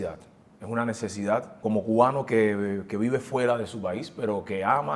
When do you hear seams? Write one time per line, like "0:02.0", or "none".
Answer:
0:01.5